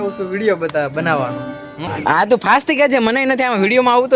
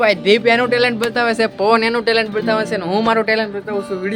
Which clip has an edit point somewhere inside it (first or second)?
first